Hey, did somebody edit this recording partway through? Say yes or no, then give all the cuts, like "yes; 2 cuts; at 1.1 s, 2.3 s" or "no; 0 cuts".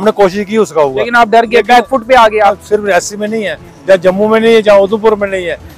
yes; 1 cut; at 2.6 s